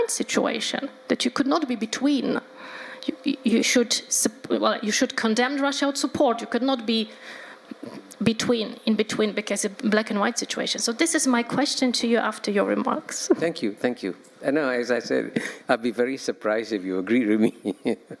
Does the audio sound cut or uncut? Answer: uncut